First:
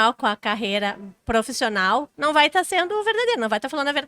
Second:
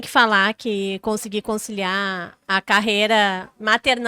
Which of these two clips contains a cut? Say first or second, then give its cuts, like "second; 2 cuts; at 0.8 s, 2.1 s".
first; 2 cuts; at 1.1 s, 2.1 s